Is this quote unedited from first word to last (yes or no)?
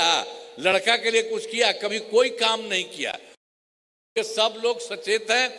yes